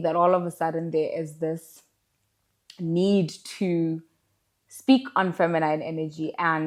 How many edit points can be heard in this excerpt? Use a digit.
0